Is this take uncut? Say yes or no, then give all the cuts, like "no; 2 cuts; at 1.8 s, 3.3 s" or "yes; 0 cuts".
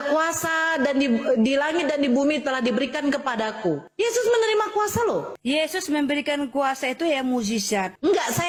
yes; 0 cuts